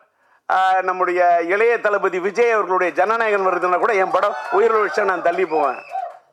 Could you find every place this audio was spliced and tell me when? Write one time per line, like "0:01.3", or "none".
none